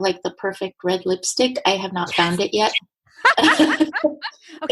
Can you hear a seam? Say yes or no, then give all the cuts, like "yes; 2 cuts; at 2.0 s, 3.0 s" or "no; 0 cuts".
no; 0 cuts